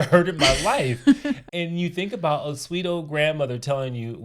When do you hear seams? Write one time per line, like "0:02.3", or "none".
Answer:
0:01.4